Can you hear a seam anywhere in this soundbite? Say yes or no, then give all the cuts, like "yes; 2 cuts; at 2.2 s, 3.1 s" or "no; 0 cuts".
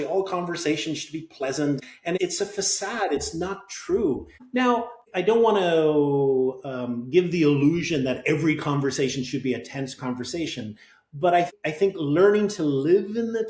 no; 0 cuts